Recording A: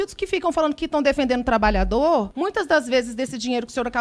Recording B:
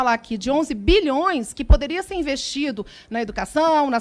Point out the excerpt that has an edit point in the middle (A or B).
A